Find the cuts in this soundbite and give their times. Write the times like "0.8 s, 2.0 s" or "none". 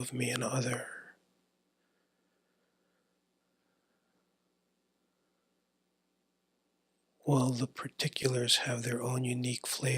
none